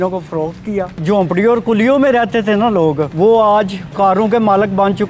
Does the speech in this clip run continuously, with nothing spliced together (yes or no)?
no